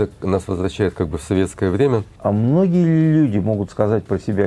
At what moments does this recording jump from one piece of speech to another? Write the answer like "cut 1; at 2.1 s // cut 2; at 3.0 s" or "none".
cut 1; at 2.1 s